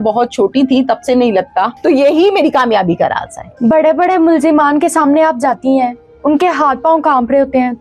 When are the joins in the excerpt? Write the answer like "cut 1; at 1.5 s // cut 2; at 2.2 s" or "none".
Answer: cut 1; at 1.7 s